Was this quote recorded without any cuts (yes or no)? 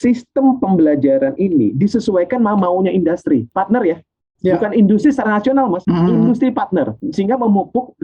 no